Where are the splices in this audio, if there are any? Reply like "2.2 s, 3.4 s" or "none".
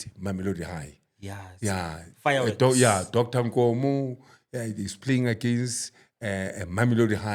none